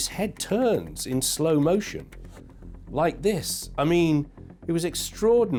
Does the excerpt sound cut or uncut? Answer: uncut